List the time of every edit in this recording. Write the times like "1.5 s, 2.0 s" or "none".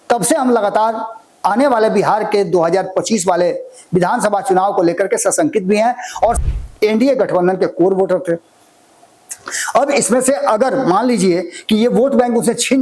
6.4 s